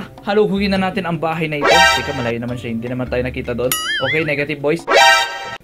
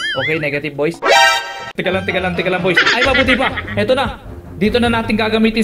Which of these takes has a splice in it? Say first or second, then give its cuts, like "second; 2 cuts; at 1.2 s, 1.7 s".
second; 1 cut; at 2.9 s